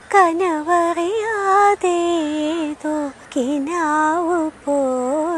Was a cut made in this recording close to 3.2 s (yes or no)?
yes